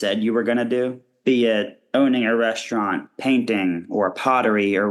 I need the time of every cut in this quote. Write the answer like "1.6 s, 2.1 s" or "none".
1.1 s, 1.8 s, 3.1 s

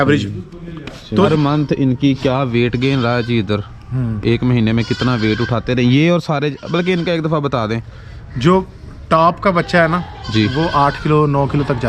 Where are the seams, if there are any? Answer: 1.3 s

